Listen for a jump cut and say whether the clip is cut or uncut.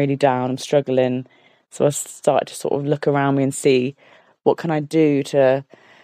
uncut